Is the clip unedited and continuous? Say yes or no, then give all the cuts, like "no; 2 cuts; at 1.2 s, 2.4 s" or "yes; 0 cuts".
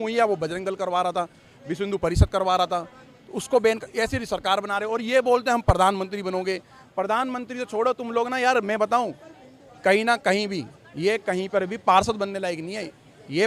yes; 0 cuts